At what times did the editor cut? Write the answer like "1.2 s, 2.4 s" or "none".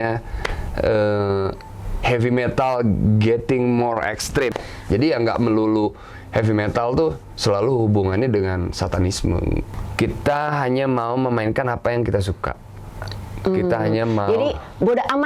4.5 s, 9.7 s